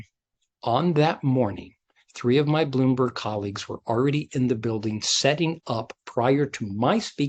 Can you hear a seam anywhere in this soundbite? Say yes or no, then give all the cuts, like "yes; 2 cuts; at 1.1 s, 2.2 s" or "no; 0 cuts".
no; 0 cuts